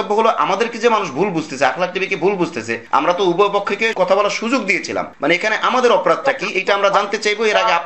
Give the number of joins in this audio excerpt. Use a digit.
1